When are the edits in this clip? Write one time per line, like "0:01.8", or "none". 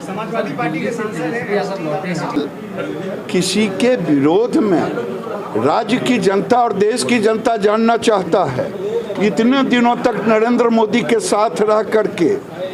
0:02.4